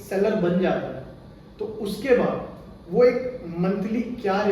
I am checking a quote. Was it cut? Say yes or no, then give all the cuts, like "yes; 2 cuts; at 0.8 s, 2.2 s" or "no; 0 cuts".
no; 0 cuts